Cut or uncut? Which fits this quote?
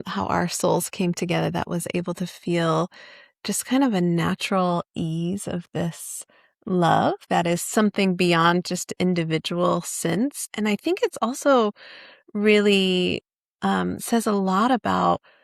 cut